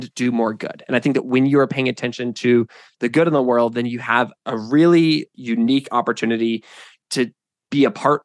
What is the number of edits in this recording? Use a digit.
2